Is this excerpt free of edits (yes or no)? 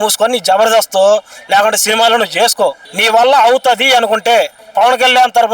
no